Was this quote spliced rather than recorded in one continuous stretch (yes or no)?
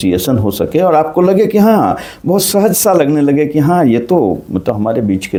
no